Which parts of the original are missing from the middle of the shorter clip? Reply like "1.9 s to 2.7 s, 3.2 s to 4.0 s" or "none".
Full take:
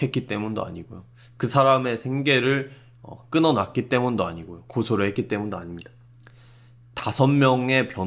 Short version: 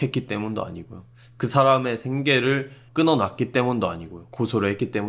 2.8 s to 3.1 s